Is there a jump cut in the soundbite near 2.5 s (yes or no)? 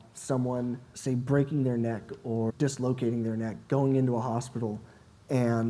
yes